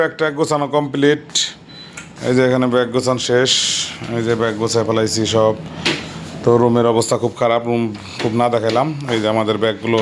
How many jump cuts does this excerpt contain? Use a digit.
0